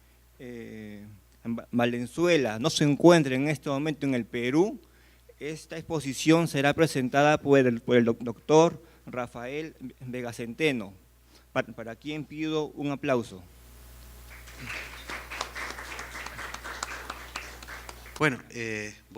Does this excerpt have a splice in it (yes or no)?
yes